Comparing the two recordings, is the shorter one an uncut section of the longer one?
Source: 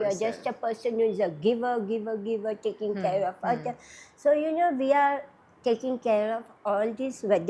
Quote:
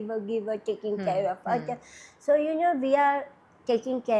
yes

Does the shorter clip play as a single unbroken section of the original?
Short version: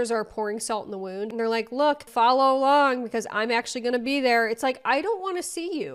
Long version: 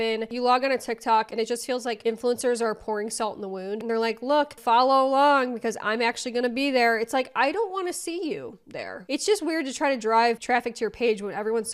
yes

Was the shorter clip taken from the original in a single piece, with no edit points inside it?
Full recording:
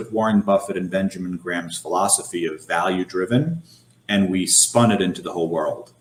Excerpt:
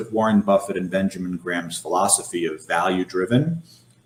yes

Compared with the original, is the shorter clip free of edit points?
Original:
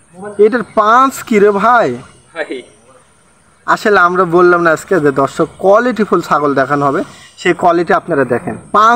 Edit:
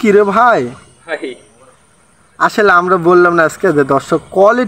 yes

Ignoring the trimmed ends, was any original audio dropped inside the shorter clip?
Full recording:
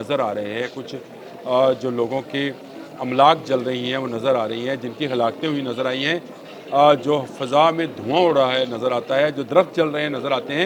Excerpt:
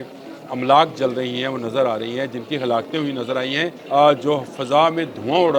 yes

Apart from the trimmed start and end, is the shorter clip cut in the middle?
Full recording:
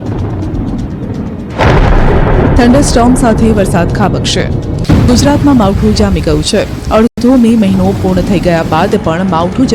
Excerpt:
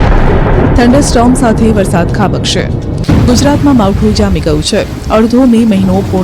yes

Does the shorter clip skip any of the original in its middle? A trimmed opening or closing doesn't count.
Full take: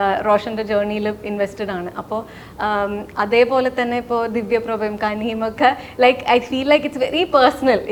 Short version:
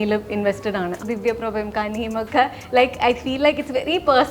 yes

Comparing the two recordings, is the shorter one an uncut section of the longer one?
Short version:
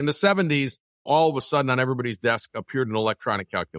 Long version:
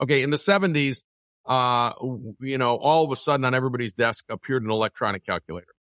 no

